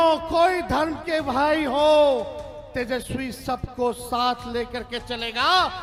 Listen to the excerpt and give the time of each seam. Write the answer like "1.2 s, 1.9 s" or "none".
none